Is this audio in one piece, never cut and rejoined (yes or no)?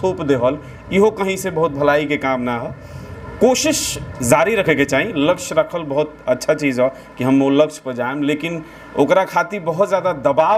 yes